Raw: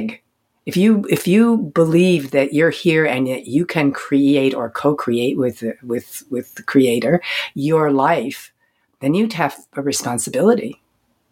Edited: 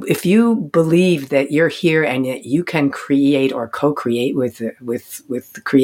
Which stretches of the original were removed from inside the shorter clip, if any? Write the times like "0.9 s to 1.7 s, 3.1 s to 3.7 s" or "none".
none